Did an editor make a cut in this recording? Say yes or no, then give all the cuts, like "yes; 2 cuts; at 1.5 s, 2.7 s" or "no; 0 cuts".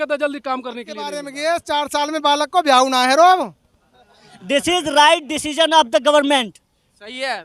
yes; 1 cut; at 1.2 s